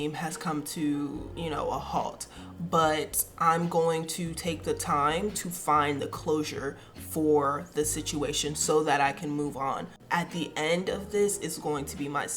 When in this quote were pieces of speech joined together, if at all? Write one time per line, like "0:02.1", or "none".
0:01.3
0:09.9